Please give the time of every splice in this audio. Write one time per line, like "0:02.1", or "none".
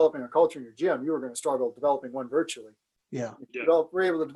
none